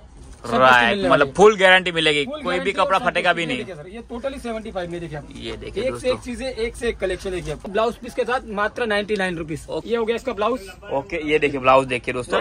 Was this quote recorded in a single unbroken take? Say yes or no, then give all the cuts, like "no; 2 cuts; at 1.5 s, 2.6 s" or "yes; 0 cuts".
no; 2 cuts; at 7.6 s, 9.8 s